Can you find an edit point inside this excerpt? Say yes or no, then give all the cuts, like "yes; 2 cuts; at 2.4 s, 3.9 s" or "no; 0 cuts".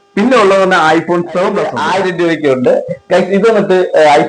yes; 1 cut; at 1.8 s